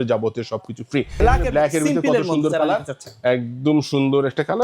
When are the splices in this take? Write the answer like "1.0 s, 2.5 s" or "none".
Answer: 1.2 s